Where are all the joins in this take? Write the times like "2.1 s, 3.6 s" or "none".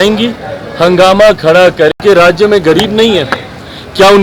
2.0 s